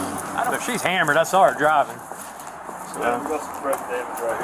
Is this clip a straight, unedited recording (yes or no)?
yes